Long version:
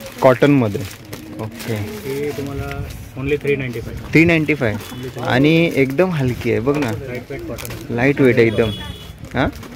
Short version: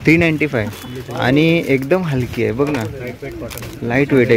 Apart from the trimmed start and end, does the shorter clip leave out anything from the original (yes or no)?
no